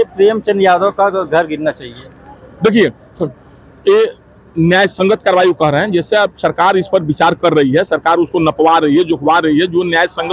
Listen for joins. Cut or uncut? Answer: uncut